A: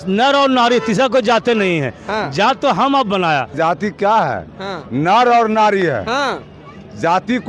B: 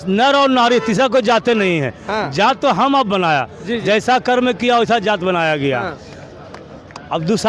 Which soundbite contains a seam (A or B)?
A